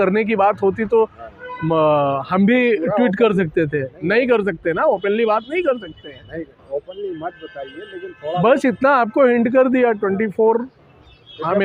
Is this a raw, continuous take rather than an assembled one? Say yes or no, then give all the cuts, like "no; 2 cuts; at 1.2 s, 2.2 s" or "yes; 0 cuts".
yes; 0 cuts